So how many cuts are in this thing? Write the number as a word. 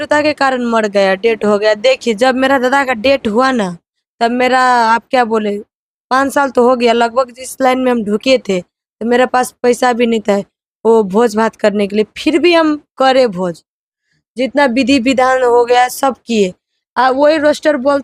zero